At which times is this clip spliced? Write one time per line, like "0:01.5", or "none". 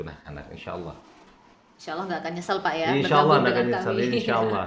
none